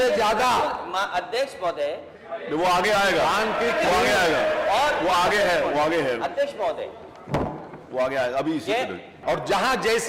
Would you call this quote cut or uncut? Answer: cut